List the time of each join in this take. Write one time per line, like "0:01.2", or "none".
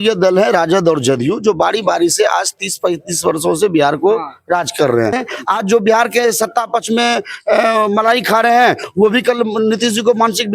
0:05.2